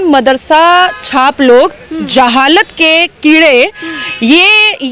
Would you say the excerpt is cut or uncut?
uncut